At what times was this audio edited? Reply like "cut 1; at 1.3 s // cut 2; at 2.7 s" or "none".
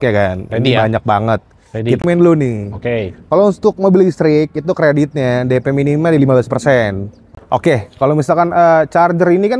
cut 1; at 2.0 s // cut 2; at 7.4 s

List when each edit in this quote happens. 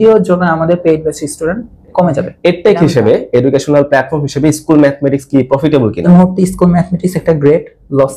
cut 1; at 2.3 s // cut 2; at 6.1 s

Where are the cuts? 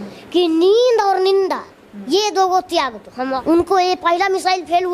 cut 1; at 3.4 s

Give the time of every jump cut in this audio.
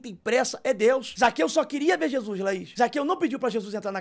cut 1; at 1.1 s // cut 2; at 2.7 s

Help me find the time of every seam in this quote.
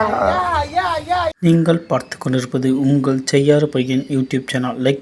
cut 1; at 1.3 s

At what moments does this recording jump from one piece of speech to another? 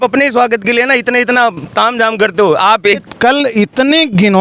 cut 1; at 3.0 s

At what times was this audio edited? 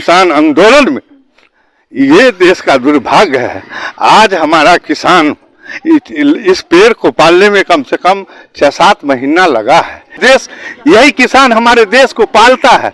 cut 1; at 10.1 s

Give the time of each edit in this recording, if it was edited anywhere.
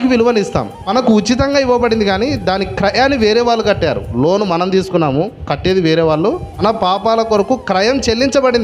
cut 1; at 1.2 s // cut 2; at 6.6 s

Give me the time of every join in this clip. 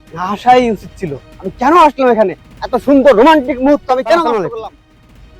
cut 1; at 4.4 s

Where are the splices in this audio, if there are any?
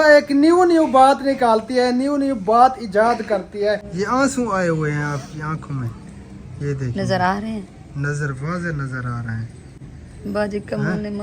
cut 1; at 3.9 s

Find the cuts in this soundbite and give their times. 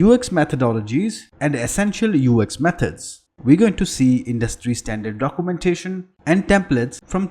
cut 1; at 3.2 s

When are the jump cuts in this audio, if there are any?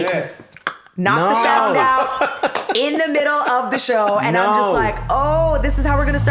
none

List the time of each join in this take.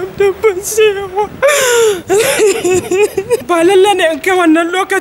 cut 1; at 3.4 s

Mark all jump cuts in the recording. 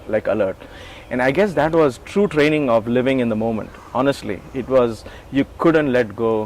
none

